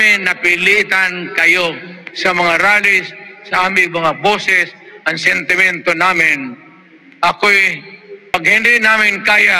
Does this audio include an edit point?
yes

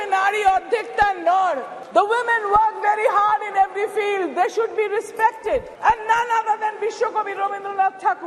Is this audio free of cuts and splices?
no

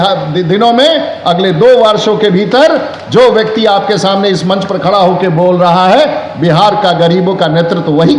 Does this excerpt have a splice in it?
no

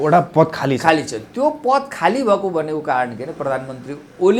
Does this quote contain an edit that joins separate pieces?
no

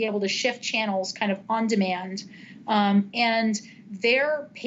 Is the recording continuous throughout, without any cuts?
yes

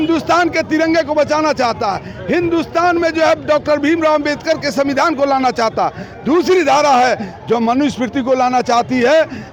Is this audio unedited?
yes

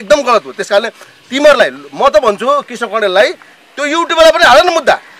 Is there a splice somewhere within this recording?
no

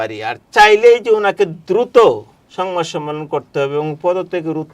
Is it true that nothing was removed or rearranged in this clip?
yes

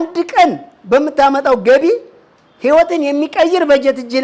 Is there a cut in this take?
no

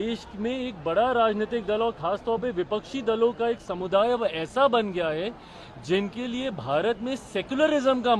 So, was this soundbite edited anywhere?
no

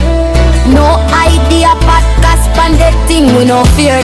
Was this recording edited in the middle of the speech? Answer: no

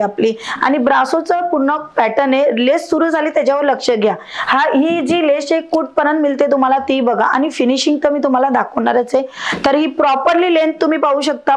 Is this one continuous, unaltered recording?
yes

